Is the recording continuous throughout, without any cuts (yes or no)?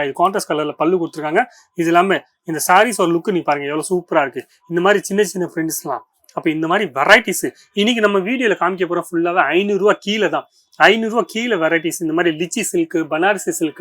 yes